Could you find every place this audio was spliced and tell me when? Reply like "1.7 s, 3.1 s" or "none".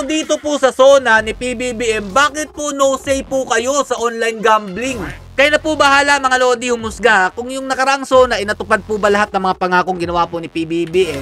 5.2 s